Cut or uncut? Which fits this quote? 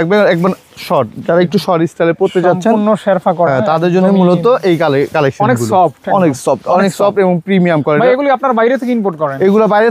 uncut